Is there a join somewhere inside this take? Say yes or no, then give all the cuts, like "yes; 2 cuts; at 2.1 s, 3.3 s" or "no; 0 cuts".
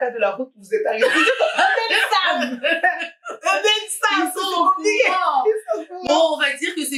no; 0 cuts